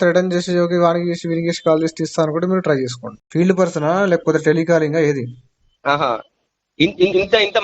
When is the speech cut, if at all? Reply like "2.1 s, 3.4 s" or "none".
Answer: 3.2 s